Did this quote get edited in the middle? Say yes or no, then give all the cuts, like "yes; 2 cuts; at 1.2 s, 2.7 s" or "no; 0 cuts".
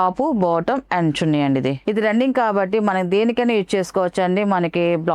yes; 1 cut; at 1.8 s